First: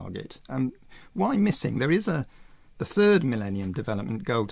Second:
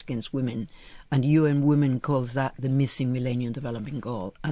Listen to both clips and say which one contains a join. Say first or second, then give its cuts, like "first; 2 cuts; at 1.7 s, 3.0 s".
first; 1 cut; at 3.1 s